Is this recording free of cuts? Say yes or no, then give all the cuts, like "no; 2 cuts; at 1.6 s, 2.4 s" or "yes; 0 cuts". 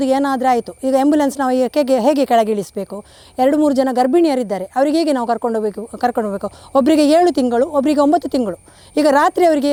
yes; 0 cuts